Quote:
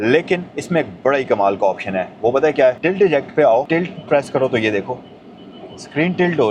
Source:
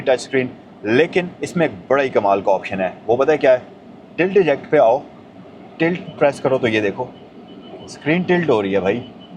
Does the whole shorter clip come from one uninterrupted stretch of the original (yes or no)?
no